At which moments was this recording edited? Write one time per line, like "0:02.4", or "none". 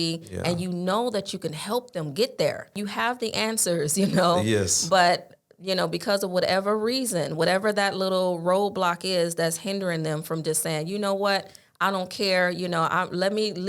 0:02.8